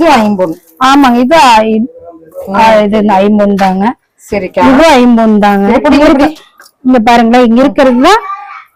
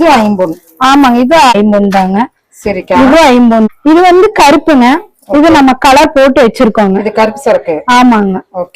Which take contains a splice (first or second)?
second